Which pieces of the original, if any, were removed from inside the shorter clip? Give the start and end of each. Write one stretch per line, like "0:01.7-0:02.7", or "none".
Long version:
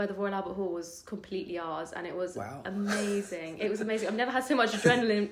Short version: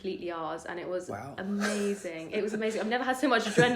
none